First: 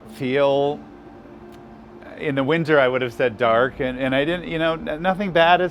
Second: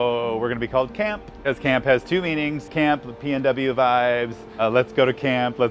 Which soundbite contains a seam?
second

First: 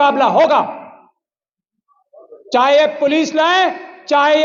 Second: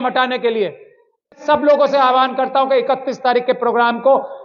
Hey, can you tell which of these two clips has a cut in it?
second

